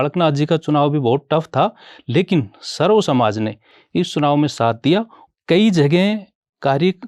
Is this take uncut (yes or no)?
no